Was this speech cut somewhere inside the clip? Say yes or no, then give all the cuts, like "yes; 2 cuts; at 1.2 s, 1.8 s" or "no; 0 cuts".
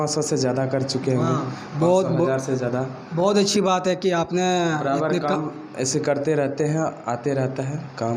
no; 0 cuts